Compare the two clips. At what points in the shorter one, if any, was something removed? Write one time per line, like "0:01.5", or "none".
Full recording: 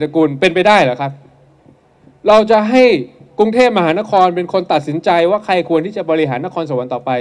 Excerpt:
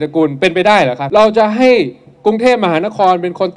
0:01.0